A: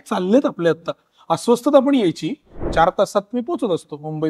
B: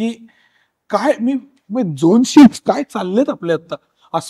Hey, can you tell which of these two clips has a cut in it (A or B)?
A